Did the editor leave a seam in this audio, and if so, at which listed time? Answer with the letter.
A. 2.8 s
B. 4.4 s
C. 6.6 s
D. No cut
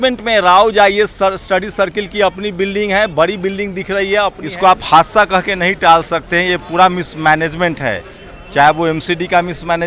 B